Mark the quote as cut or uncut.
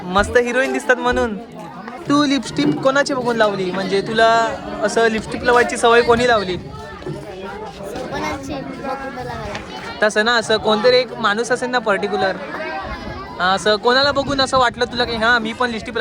cut